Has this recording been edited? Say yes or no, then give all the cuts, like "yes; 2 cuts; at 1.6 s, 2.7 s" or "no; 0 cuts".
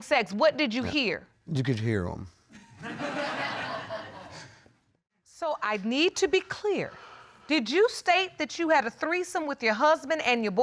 yes; 1 cut; at 5.1 s